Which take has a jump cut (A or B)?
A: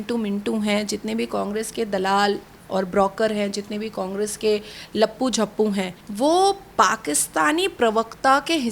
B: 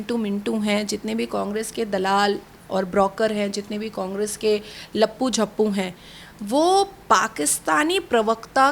A